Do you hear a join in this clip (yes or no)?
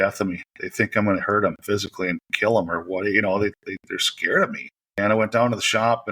yes